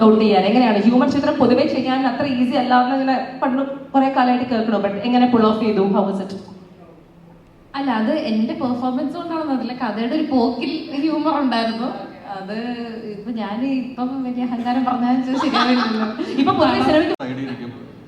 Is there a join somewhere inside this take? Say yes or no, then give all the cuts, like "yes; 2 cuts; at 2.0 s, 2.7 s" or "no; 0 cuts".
yes; 1 cut; at 17.2 s